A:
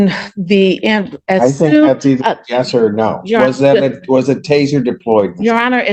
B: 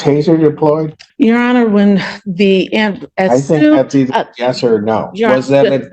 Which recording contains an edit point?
B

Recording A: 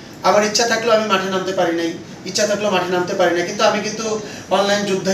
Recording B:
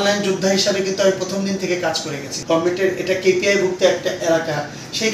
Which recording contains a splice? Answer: B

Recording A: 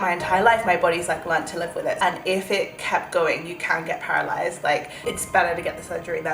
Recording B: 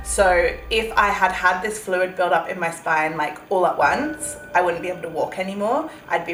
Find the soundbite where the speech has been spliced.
A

